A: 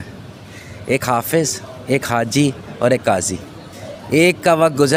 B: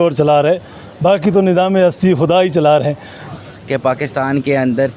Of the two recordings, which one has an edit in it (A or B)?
B